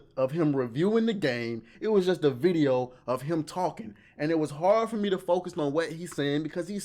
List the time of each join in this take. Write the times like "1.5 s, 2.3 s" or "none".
1.7 s